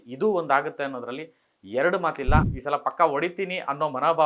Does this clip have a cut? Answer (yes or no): yes